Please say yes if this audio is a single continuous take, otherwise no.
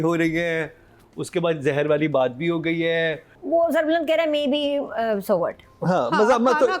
no